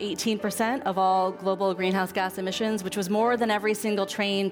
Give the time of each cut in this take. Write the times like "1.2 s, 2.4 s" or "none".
none